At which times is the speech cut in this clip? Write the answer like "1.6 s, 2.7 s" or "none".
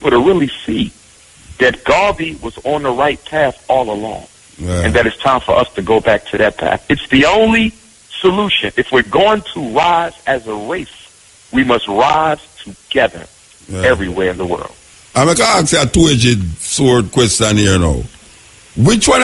none